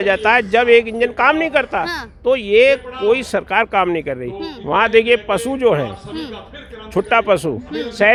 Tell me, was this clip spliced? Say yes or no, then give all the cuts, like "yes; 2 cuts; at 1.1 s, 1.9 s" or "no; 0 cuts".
no; 0 cuts